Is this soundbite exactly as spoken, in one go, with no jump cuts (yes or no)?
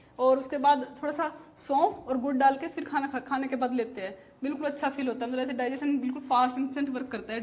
yes